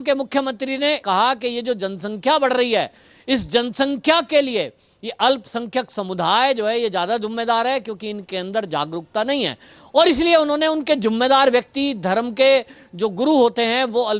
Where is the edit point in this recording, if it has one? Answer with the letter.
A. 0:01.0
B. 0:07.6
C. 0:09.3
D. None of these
A